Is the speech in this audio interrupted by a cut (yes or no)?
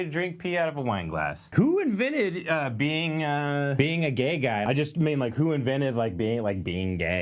yes